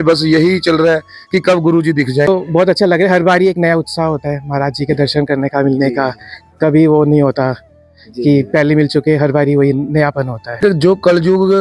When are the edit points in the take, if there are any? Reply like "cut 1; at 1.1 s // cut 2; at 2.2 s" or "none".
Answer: cut 1; at 2.3 s // cut 2; at 10.4 s